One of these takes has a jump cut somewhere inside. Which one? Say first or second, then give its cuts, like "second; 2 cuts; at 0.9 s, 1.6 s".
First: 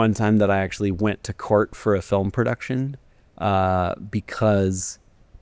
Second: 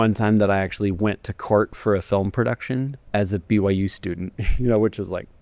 second; 1 cut; at 3.0 s